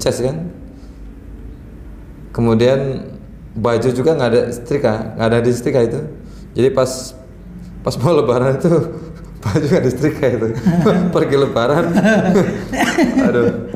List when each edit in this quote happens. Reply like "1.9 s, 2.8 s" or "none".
none